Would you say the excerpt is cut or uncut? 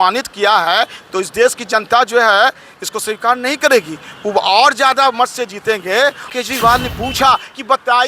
cut